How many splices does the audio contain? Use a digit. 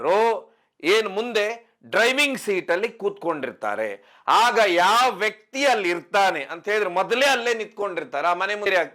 0